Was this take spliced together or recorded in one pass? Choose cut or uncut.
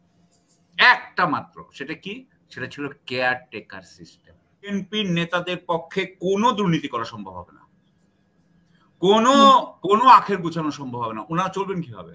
cut